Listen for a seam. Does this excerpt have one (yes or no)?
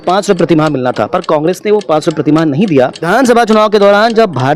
yes